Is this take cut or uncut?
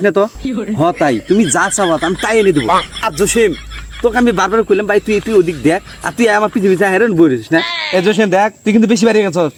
uncut